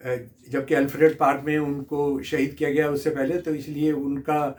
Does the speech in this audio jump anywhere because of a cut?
no; 0 cuts

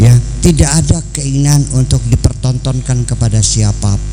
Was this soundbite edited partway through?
no; 0 cuts

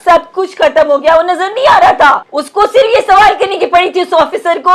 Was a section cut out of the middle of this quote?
yes; 1 cut; at 2.3 s

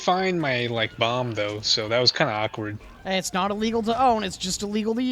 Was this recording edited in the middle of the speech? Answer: yes; 1 cut; at 2.8 s

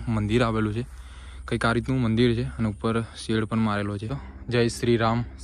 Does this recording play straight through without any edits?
no; 1 cut; at 4.2 s

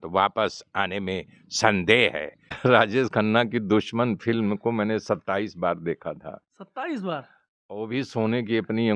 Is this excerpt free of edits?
no; 1 cut; at 2.5 s

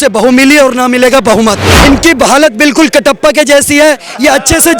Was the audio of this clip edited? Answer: yes; 1 cut; at 1.7 s

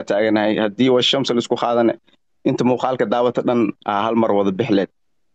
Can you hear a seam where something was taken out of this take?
no; 0 cuts

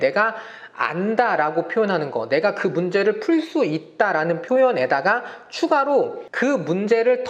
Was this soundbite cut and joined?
yes; 1 cut; at 6.2 s

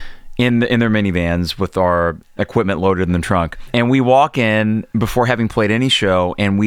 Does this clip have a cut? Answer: yes; 1 cut; at 3.6 s

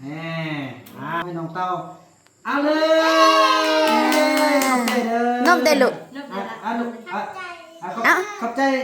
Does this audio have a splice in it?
yes; 1 cut; at 1.2 s

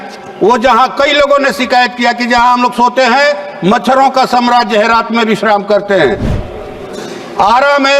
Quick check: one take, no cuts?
no; 1 cut; at 6.3 s

